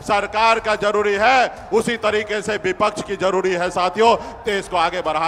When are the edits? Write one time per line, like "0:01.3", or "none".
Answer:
none

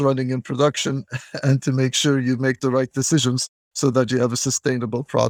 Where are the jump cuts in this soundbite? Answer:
none

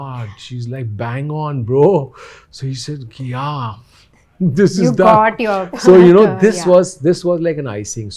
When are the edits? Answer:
none

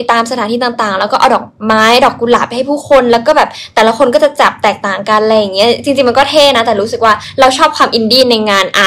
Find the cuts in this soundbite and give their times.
none

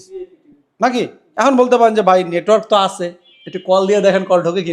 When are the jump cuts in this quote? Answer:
0:01.2

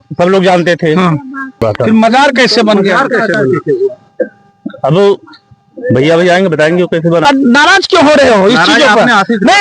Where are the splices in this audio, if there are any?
0:01.6
0:07.2

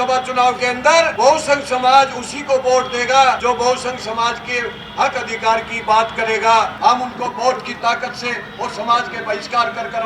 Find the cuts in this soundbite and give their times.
0:01.1
0:03.4
0:06.7

